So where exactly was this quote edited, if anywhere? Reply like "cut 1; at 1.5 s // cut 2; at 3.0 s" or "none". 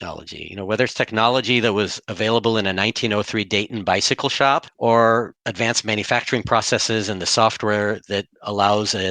cut 1; at 4.7 s // cut 2; at 5.4 s